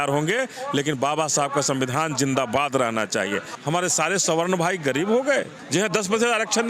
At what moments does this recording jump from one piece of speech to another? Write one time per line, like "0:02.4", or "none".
0:03.5
0:05.6